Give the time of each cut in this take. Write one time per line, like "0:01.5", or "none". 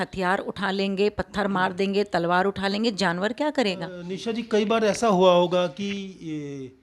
0:04.1